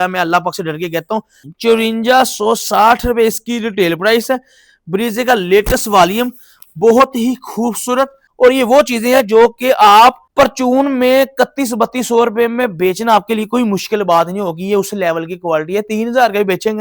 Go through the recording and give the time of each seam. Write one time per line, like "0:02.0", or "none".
0:01.4
0:08.2
0:10.2